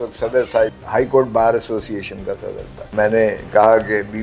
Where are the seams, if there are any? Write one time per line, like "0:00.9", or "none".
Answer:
0:02.9